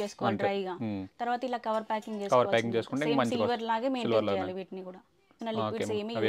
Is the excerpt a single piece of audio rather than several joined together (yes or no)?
no